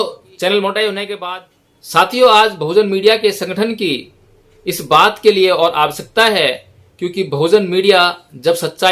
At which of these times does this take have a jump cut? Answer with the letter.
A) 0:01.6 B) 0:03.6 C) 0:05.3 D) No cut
A